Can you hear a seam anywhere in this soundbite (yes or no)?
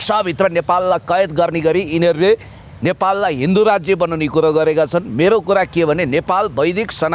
no